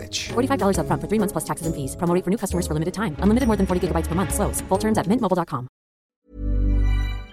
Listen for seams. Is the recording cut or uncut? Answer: cut